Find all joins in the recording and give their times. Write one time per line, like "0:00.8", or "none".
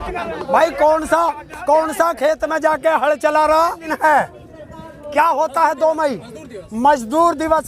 0:03.9